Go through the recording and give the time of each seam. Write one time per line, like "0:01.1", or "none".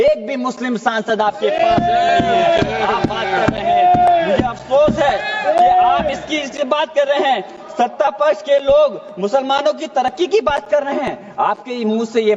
none